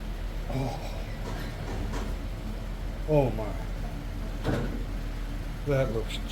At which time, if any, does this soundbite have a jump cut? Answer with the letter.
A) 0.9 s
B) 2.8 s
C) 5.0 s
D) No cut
D